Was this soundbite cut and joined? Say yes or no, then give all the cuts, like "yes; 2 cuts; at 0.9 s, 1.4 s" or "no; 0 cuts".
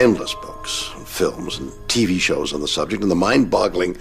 no; 0 cuts